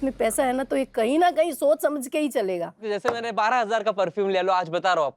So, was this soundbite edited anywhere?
yes; 1 cut; at 2.8 s

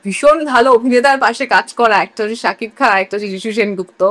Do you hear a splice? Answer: no; 0 cuts

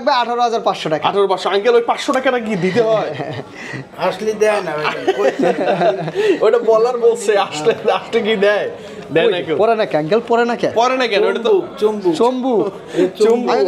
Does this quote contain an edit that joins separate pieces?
no; 0 cuts

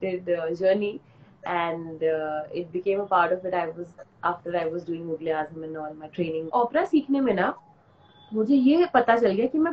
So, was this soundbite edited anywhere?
yes; 1 cut; at 6.5 s

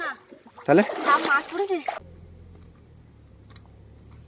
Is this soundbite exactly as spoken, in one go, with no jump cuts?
no; 1 cut; at 2.0 s

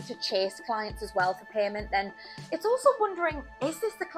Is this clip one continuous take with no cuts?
yes; 0 cuts

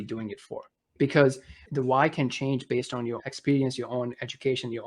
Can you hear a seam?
yes; 3 cuts; at 0.9 s, 1.6 s, 3.2 s

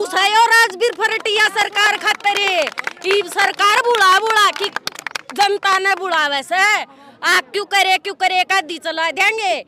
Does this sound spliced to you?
no; 0 cuts

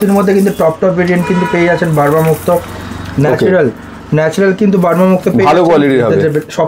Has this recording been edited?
no; 0 cuts

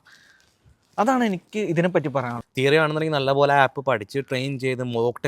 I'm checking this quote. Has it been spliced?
yes; 1 cut; at 2.4 s

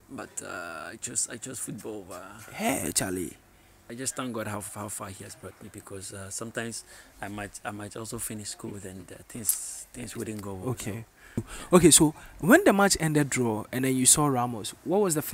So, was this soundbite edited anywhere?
yes; 2 cuts; at 3.8 s, 11.5 s

